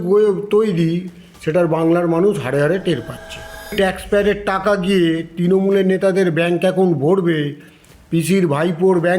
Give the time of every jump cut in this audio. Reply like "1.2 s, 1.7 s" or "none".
3.7 s